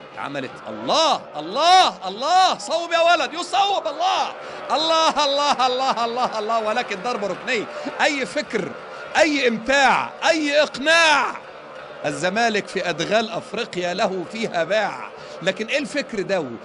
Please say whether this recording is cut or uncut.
cut